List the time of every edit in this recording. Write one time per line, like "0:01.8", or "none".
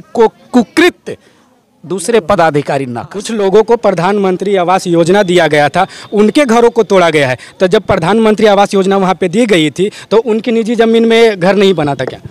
0:03.3